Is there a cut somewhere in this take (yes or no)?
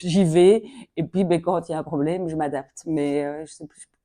no